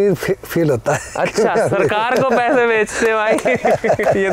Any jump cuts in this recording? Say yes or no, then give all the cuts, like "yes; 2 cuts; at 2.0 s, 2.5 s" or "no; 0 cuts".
no; 0 cuts